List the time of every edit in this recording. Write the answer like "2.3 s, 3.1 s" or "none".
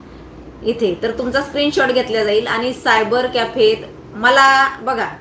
none